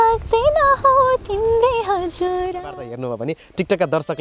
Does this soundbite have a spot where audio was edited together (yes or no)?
yes